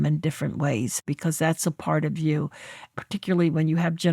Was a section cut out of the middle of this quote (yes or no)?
yes